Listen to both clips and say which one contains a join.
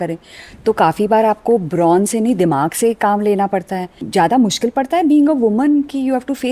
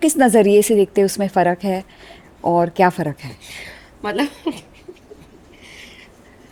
first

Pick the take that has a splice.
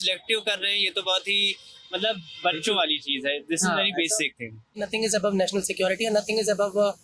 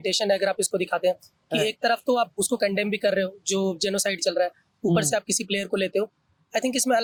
first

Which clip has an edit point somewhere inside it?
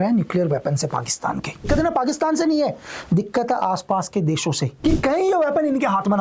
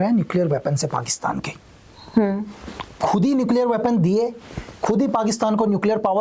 first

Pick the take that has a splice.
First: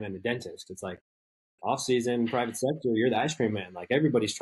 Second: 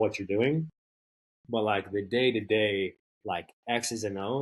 second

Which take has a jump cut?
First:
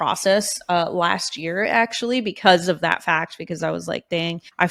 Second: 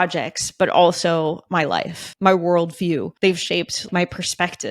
second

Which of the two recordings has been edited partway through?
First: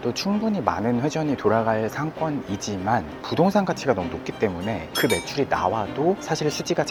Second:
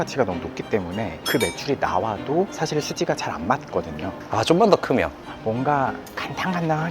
second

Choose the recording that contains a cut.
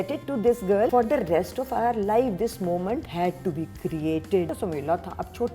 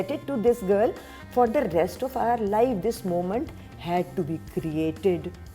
first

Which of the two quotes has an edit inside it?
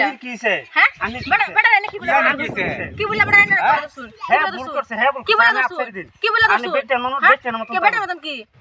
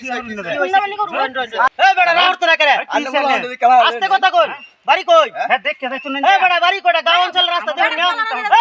second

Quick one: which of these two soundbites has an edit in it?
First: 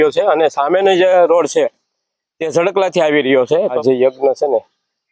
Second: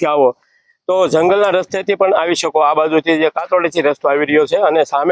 first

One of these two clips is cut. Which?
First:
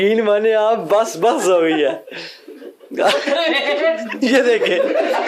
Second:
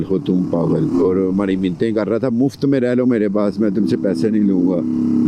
second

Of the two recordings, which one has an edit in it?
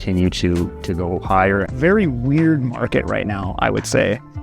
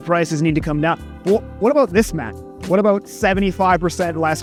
first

